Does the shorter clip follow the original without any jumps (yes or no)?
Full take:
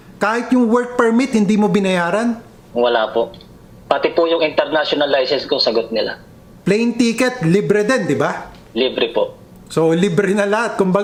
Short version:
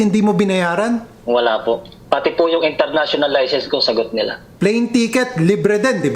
no